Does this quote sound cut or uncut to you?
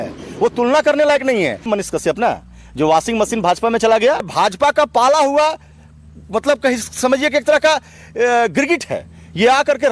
cut